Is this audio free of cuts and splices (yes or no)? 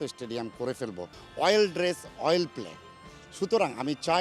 no